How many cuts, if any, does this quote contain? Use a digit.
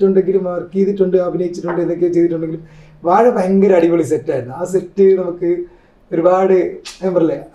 0